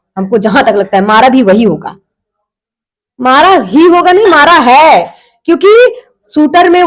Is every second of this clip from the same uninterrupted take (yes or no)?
yes